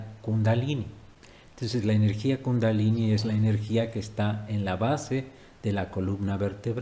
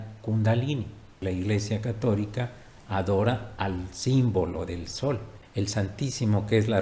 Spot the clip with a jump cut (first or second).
second